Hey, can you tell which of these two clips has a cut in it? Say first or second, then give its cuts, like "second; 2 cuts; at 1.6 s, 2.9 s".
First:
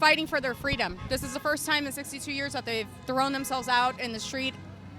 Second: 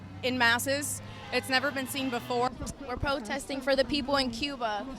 second; 1 cut; at 2.5 s